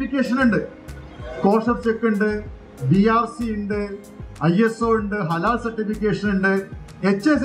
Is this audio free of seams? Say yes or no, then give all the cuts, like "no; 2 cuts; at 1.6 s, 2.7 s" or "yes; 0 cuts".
yes; 0 cuts